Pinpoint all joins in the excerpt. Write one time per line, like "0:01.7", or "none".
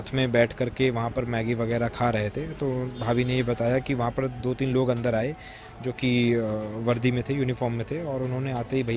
none